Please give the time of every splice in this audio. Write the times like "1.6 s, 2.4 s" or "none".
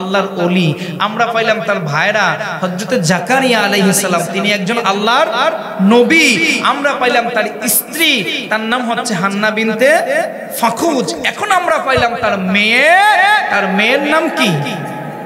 none